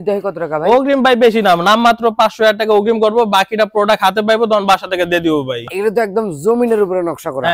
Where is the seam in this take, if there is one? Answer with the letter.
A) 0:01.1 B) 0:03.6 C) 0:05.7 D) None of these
C